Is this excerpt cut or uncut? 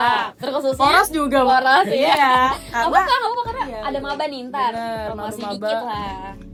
uncut